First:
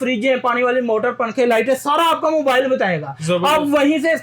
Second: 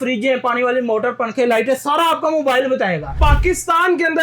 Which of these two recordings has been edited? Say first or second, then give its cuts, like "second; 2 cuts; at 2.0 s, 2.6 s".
second; 1 cut; at 3.2 s